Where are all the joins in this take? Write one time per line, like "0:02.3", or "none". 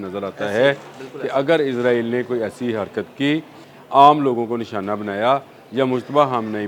0:03.7